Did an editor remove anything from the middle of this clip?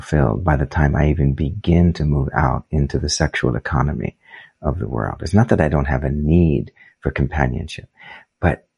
no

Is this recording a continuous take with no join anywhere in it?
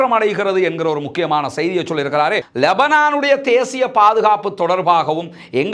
no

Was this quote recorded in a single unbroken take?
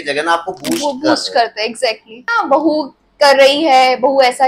no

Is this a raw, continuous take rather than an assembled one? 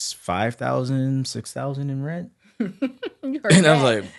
yes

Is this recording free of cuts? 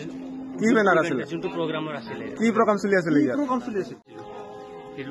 no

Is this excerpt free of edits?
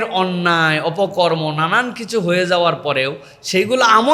yes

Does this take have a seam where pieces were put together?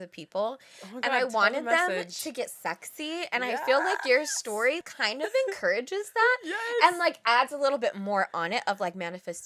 yes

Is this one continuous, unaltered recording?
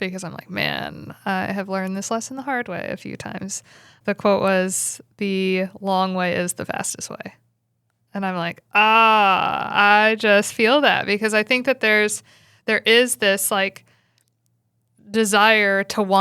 no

